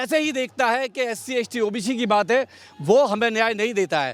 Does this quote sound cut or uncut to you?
uncut